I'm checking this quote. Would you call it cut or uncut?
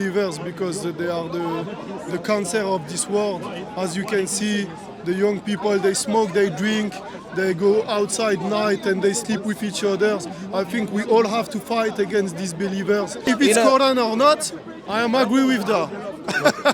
cut